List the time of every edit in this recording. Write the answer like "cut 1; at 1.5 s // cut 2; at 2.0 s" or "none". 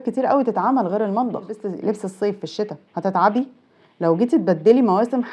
cut 1; at 1.6 s